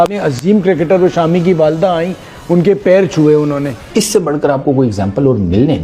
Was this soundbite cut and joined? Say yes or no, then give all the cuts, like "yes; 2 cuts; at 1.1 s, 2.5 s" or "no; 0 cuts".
yes; 1 cut; at 3.8 s